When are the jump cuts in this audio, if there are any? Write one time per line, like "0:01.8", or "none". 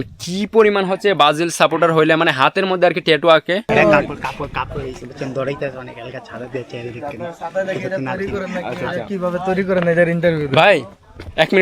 0:03.7